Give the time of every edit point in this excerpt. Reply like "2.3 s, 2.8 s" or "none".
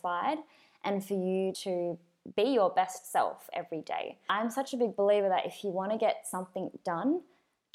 1.6 s, 4.3 s

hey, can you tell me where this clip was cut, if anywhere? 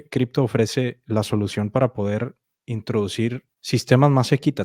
3.5 s

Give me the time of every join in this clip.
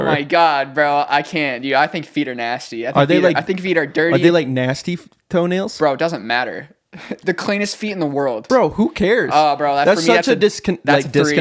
8.4 s

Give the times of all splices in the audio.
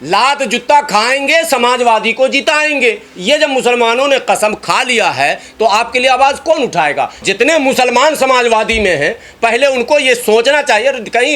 7.3 s

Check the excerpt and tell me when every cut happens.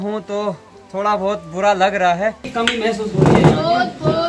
2.5 s

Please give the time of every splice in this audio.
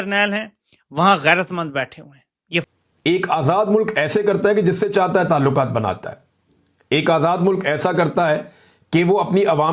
2.7 s

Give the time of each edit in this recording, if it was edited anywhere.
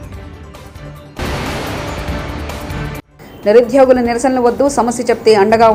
none

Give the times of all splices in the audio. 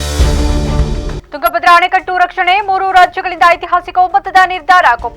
1.1 s

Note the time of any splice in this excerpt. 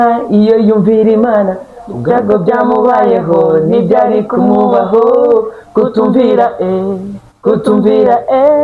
none

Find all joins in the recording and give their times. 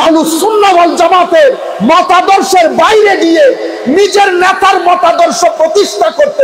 none

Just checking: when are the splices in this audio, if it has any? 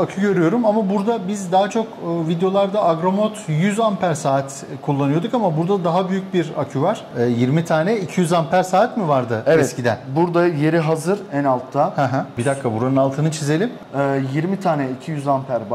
7.1 s, 12.3 s, 13.8 s

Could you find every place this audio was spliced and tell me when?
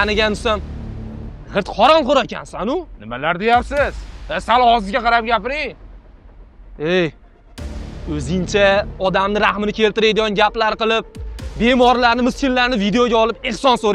none

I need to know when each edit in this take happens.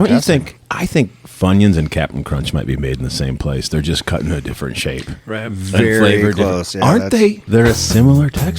7.4 s

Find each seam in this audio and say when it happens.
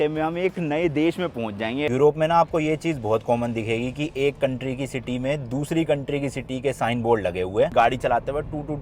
1.9 s, 7.7 s

